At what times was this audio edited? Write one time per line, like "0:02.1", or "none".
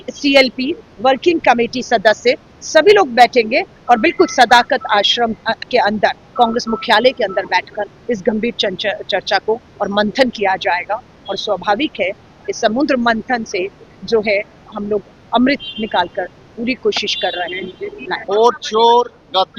0:18.2